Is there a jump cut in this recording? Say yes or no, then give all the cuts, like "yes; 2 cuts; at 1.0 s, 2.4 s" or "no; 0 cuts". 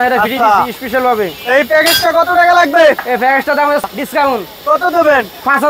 yes; 1 cut; at 3.9 s